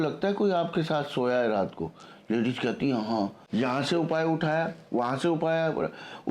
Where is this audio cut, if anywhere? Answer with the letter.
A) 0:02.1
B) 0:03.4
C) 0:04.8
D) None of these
B